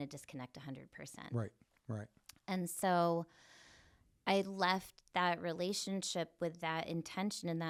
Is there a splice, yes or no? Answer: no